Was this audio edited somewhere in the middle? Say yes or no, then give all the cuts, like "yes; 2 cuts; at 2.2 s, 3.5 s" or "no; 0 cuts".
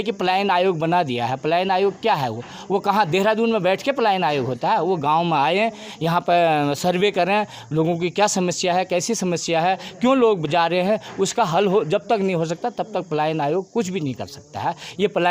no; 0 cuts